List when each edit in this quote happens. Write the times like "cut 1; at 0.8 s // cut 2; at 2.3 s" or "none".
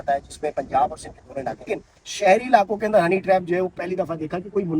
cut 1; at 1.7 s